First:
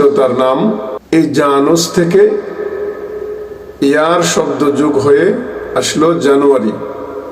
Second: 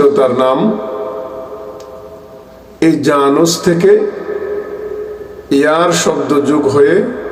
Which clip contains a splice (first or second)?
first